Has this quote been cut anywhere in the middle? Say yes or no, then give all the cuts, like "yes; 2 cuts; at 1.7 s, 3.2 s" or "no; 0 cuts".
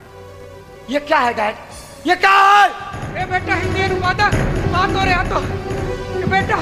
no; 0 cuts